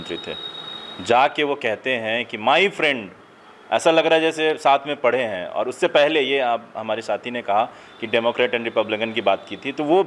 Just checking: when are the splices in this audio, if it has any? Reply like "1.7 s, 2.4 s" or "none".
none